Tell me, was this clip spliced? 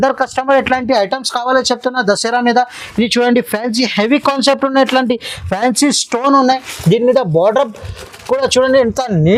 no; 0 cuts

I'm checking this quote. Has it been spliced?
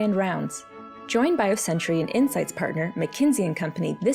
no; 0 cuts

